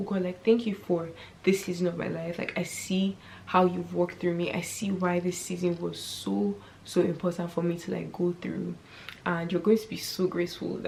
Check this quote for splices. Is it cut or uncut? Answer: uncut